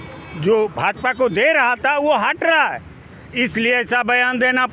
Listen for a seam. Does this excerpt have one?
no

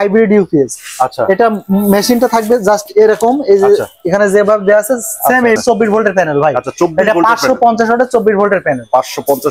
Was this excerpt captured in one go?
no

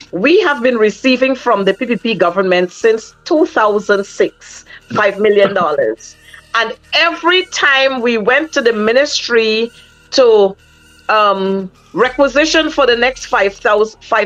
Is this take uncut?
yes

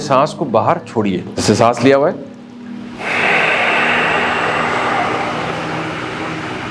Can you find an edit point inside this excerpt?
yes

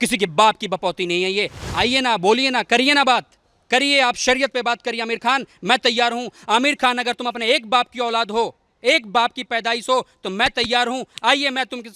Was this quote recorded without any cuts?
no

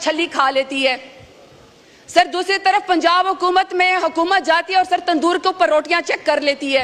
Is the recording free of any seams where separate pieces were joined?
yes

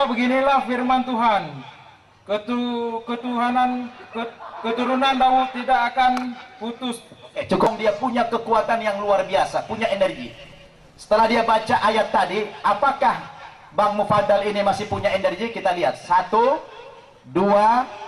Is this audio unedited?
no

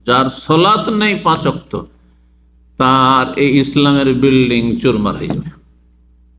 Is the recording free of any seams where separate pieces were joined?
yes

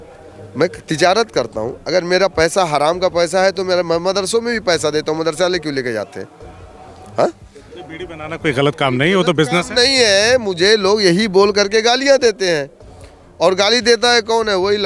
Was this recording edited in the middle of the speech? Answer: no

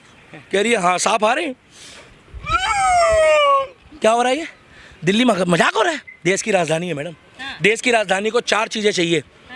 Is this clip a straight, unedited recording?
yes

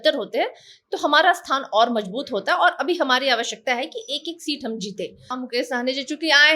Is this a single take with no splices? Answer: no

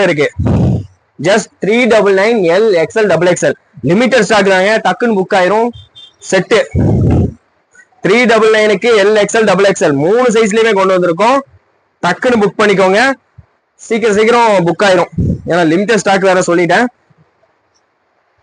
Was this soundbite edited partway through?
no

